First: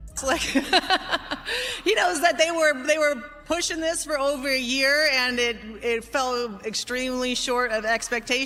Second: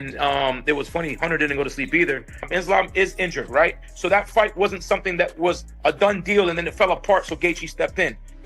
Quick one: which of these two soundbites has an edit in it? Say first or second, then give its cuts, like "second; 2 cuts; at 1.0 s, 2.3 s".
second; 1 cut; at 2.5 s